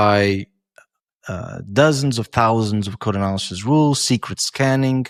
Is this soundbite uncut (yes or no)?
yes